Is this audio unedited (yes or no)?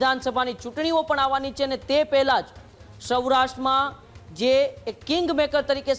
yes